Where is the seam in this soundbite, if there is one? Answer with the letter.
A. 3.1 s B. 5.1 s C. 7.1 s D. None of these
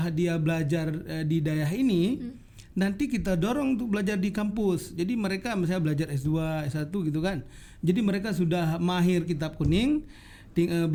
D